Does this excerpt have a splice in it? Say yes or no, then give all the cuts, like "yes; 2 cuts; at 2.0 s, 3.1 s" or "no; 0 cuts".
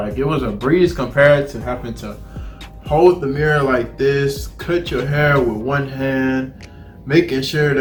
no; 0 cuts